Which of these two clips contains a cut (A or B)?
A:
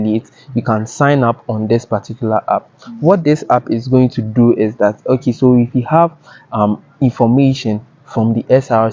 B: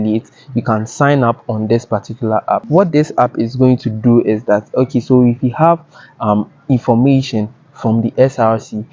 B